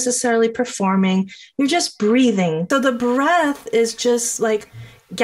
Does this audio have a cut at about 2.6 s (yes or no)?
yes